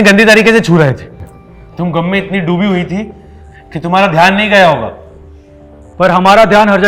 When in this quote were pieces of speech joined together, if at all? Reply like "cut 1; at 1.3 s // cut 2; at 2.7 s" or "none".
none